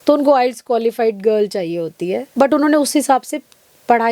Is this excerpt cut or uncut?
cut